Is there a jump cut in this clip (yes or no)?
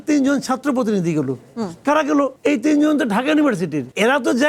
no